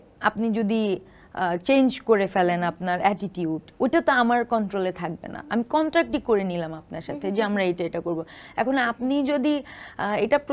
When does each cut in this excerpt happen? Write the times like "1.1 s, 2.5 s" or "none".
none

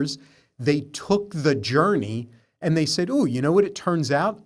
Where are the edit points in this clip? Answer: none

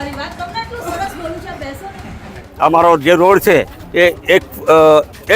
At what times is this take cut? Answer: 2.4 s

